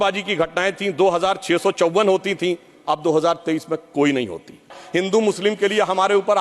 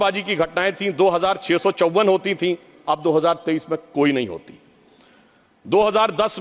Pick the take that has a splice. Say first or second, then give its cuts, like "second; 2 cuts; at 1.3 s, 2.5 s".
first; 1 cut; at 4.8 s